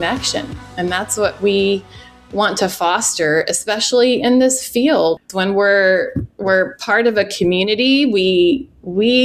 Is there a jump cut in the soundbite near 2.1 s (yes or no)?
no